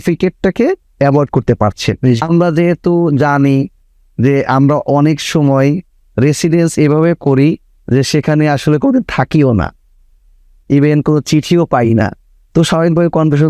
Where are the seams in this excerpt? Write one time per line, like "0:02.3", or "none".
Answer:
0:02.2